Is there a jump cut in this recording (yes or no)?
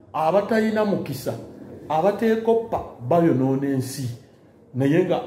no